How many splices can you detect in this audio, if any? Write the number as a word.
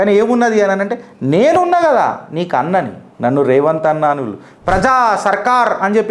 one